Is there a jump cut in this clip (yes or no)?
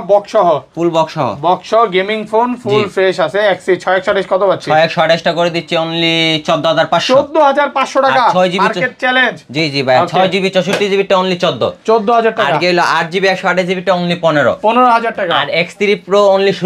no